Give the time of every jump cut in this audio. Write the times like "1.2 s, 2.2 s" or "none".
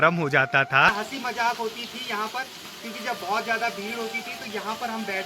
0.9 s